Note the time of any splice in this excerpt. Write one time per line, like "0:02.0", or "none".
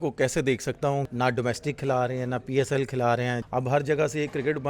0:01.1
0:03.4